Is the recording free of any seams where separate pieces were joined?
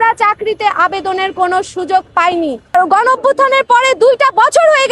no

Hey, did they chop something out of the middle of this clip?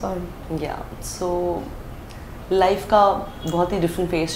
no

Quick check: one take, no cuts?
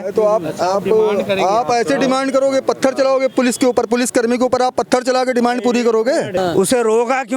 no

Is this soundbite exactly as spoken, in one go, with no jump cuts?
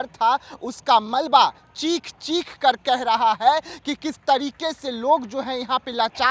yes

